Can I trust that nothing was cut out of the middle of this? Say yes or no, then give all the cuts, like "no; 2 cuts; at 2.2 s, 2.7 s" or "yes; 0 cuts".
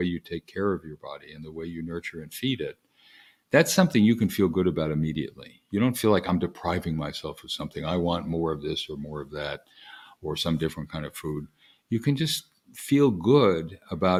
yes; 0 cuts